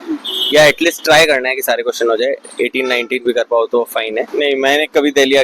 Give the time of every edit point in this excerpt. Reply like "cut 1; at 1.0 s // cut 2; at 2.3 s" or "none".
cut 1; at 4.3 s